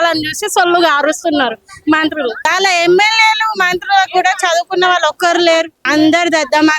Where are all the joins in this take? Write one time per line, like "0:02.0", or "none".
0:02.5
0:05.8